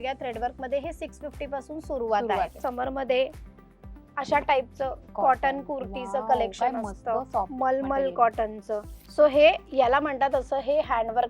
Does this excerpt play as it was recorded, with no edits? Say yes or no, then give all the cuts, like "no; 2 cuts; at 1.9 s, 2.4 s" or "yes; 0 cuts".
no; 2 cuts; at 2.6 s, 9.0 s